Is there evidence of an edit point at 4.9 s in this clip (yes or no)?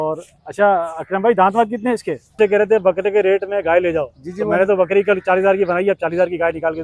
no